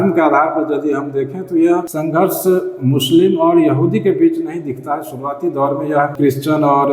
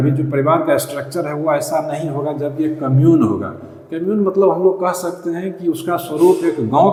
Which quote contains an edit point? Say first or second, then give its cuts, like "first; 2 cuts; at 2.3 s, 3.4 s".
first; 2 cuts; at 1.9 s, 6.1 s